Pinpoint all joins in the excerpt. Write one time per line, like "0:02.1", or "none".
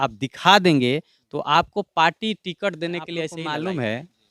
0:03.4